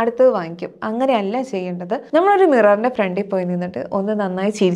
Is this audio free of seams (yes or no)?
no